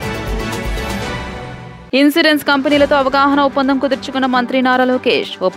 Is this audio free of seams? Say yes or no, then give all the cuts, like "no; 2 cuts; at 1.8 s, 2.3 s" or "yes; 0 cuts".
no; 1 cut; at 1.7 s